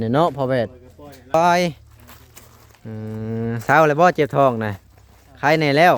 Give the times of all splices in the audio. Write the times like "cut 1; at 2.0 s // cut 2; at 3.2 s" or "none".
cut 1; at 1.3 s